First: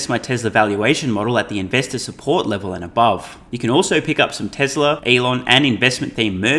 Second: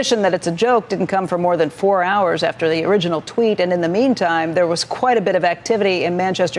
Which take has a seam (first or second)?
first